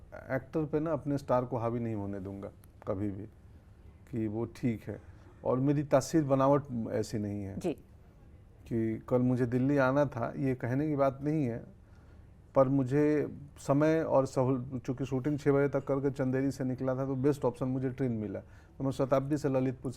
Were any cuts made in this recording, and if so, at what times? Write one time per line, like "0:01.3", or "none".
none